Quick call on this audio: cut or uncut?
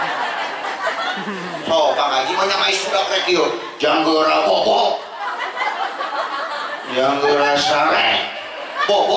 uncut